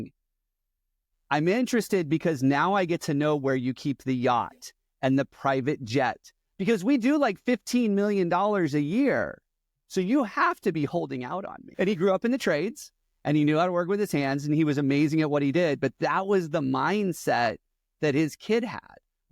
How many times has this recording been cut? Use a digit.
1